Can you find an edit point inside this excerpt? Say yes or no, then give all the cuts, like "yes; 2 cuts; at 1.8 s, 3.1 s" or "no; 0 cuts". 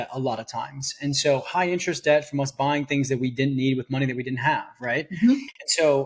no; 0 cuts